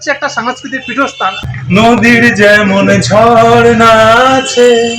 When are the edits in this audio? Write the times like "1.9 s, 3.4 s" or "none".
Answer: 1.4 s